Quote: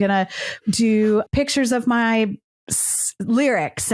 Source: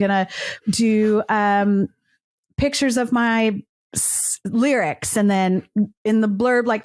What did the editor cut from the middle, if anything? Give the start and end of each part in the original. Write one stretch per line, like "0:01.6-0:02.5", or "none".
0:01.3-0:02.5